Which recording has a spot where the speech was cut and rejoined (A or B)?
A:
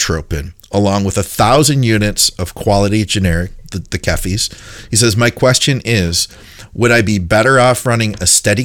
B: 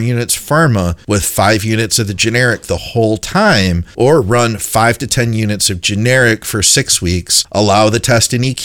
B